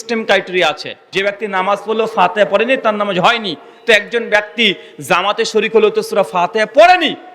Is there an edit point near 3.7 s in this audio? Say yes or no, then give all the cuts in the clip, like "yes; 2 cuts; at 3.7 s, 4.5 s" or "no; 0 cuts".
no; 1 cut; at 1.1 s